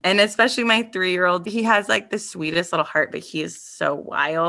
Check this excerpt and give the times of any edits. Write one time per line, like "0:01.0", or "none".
0:01.5